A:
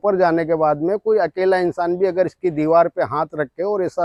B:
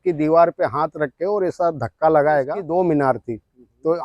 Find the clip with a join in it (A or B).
B